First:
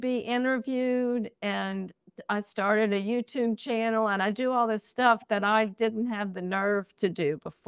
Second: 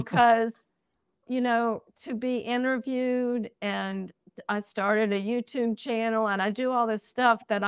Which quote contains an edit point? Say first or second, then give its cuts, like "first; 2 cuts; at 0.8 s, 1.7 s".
second; 1 cut; at 1.2 s